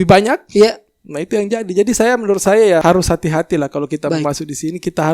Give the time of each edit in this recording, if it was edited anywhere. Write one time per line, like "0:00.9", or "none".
0:02.8